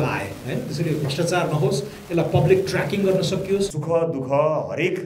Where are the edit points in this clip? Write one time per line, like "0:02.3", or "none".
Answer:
0:03.8